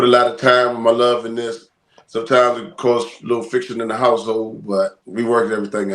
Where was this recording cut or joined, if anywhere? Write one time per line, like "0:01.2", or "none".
none